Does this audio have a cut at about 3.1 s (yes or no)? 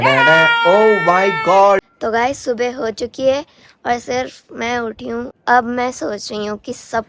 no